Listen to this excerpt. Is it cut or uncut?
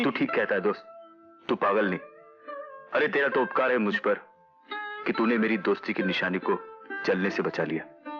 uncut